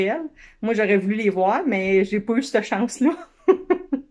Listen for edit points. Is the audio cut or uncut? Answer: uncut